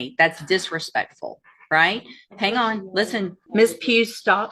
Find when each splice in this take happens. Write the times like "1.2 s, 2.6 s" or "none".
3.4 s